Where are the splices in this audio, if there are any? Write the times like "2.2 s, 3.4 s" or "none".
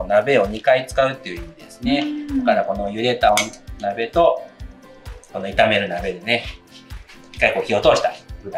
none